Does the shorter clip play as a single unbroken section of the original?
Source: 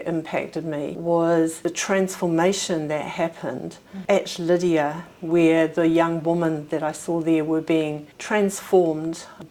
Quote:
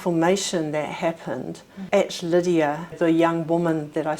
no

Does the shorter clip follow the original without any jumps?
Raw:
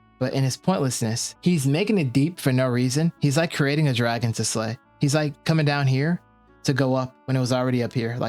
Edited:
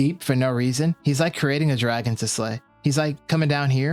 yes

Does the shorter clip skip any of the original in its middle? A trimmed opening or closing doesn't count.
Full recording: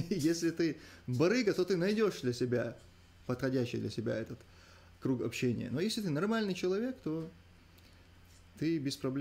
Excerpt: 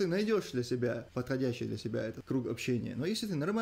yes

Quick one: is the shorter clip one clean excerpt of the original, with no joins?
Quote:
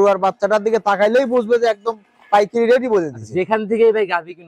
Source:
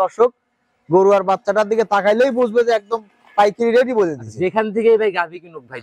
yes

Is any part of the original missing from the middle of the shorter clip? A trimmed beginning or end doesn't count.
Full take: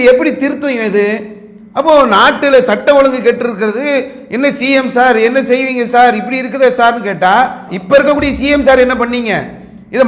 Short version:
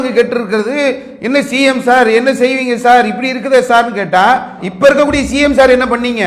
no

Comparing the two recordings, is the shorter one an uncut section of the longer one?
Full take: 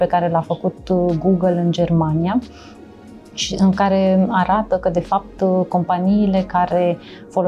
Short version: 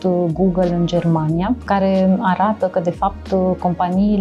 no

